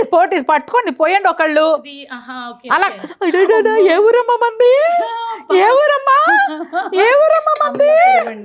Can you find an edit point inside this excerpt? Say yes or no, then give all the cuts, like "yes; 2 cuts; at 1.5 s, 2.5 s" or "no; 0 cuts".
no; 0 cuts